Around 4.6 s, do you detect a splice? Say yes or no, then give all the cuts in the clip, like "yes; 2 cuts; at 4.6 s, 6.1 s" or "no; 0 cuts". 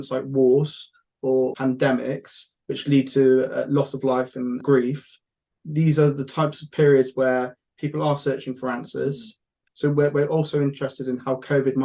yes; 3 cuts; at 1.6 s, 4.6 s, 9.6 s